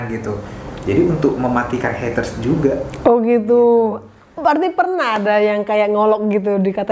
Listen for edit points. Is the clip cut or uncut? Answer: uncut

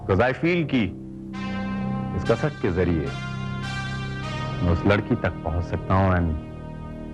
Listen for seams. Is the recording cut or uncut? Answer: uncut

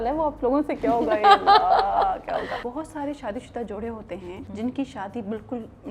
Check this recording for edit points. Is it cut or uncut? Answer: cut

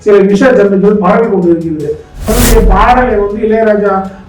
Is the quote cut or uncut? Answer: cut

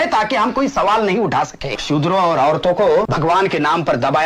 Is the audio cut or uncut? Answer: cut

